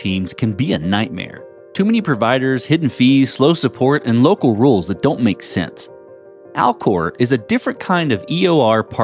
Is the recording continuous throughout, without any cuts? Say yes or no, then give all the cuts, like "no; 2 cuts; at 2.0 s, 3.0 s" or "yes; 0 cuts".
yes; 0 cuts